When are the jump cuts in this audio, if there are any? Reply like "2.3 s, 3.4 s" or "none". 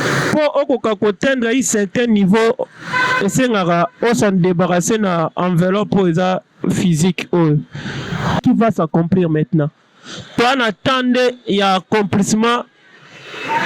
8.4 s